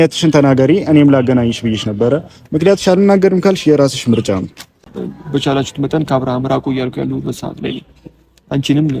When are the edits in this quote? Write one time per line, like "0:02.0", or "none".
0:04.8